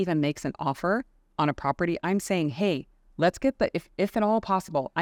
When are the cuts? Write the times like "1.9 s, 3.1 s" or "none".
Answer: none